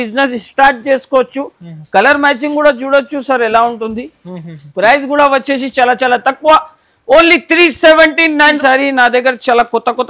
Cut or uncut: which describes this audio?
cut